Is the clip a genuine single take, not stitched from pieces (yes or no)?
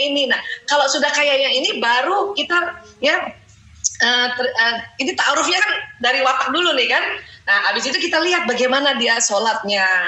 yes